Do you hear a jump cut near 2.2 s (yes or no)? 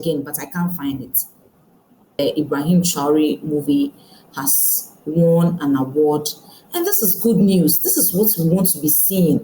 yes